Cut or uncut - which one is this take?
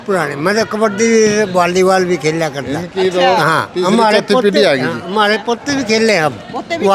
uncut